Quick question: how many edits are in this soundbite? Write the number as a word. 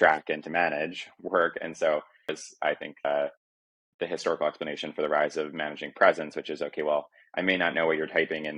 one